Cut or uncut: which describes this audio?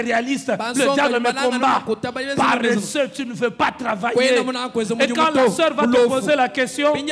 uncut